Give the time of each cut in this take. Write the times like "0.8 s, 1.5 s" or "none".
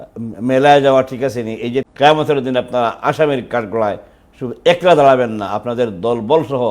1.8 s

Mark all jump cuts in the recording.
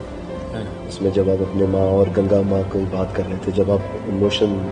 none

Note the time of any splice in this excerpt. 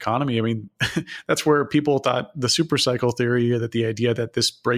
none

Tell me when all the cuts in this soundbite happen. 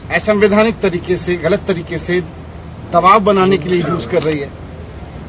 none

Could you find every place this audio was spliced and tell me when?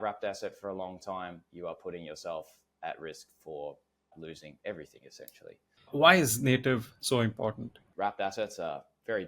5.7 s, 7.9 s

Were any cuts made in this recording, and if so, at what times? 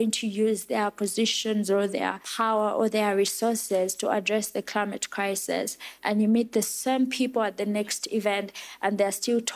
2.2 s, 5.9 s

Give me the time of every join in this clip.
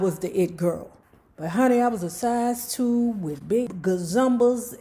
3.6 s

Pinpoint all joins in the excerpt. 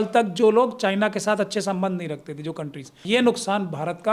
3.0 s

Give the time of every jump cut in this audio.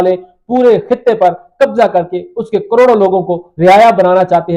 none

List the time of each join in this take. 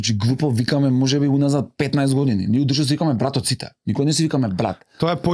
none

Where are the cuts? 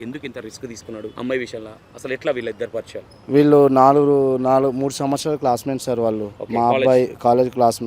1.1 s, 6.3 s

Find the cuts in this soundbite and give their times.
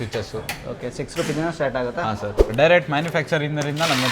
2.4 s

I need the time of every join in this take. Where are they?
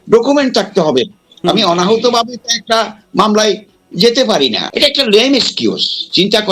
4.6 s

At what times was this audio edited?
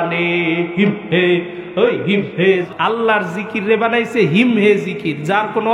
2.7 s

